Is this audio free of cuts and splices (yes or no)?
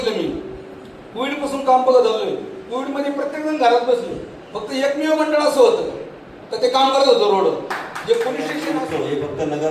no